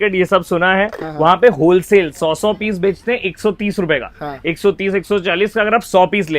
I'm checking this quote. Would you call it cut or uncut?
uncut